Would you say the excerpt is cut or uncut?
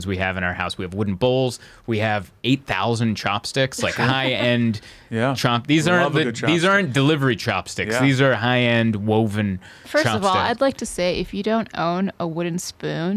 uncut